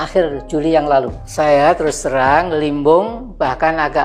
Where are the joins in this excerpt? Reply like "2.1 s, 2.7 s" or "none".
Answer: none